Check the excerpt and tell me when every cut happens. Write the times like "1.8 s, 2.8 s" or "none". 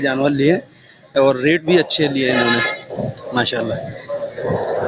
none